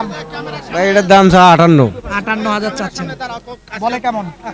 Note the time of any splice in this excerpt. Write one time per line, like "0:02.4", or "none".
none